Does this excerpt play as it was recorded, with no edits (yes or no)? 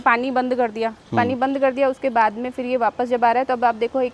yes